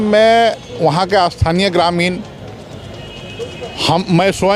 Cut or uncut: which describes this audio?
uncut